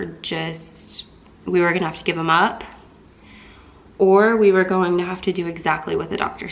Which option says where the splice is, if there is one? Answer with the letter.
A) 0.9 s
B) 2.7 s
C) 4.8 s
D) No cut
D